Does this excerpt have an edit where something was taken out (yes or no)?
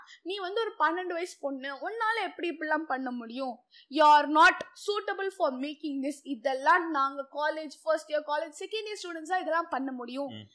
no